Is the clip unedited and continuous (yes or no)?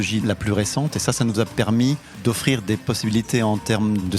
no